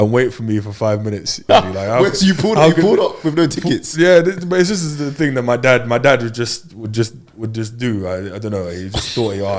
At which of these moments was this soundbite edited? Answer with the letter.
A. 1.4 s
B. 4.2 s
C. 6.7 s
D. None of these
A